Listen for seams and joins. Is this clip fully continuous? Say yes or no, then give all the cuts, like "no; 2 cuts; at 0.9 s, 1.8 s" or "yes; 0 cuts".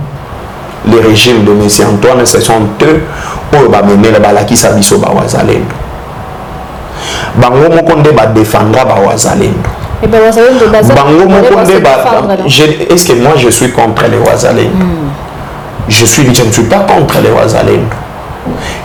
yes; 0 cuts